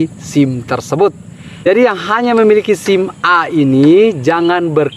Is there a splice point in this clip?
yes; 1 cut; at 1.7 s

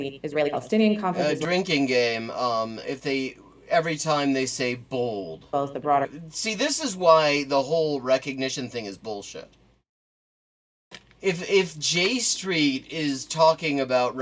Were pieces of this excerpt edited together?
yes; 1 cut; at 6.2 s

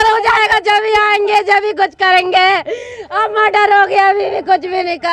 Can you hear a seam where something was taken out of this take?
no; 0 cuts

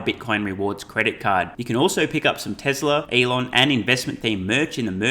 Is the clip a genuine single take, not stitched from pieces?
no; 1 cut; at 3.1 s

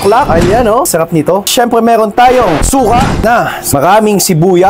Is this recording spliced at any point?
no; 0 cuts

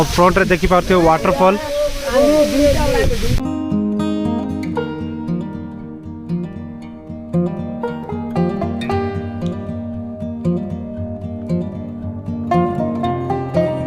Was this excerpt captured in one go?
yes; 0 cuts

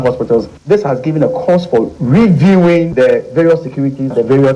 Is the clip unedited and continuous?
no; 1 cut; at 2.9 s

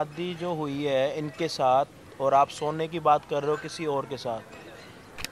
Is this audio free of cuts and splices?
yes; 0 cuts

